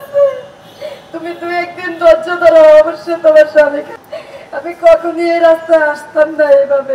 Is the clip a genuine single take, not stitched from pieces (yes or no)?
no